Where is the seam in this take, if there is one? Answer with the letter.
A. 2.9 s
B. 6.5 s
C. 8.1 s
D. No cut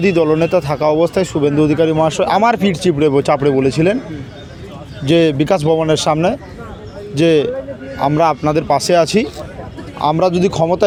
D